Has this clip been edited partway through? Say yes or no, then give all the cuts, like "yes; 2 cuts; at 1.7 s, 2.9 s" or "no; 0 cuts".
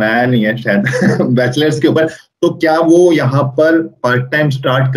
yes; 1 cut; at 2.2 s